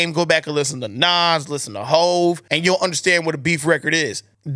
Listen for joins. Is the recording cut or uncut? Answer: cut